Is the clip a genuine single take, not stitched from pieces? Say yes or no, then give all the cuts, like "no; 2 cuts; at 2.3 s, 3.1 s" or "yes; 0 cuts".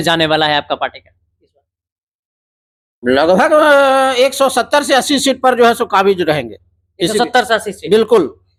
yes; 0 cuts